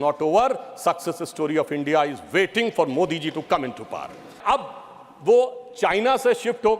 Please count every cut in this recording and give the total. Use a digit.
1